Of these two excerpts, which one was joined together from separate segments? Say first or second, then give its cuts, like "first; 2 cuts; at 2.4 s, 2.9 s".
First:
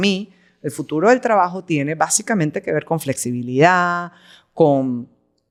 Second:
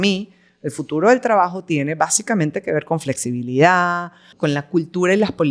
second; 1 cut; at 4.3 s